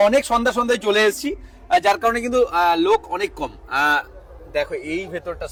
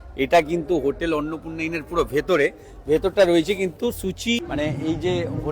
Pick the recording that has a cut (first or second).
second